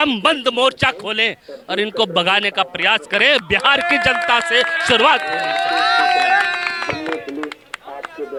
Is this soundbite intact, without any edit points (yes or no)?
yes